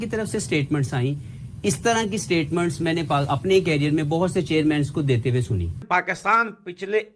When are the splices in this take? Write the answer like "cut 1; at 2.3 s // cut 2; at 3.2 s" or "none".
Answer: cut 1; at 5.8 s

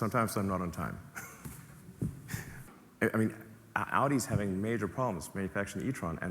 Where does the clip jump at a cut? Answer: cut 1; at 2.7 s

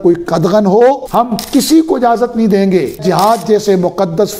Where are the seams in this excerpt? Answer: cut 1; at 1.0 s // cut 2; at 3.0 s

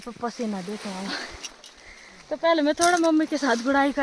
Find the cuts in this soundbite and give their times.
none

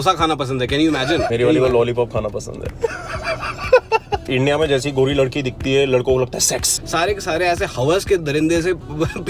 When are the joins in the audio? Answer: cut 1; at 1.3 s // cut 2; at 4.2 s // cut 3; at 6.8 s

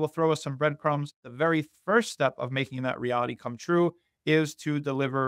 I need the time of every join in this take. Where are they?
cut 1; at 1.2 s

